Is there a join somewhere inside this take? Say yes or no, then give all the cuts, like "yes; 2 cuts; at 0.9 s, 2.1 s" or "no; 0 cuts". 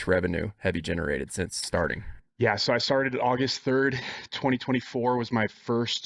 no; 0 cuts